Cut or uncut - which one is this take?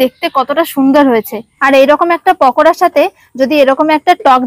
cut